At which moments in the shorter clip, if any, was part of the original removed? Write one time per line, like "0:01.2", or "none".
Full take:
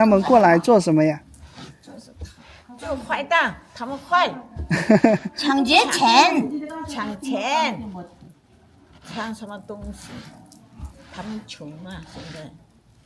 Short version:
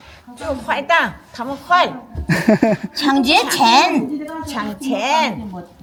none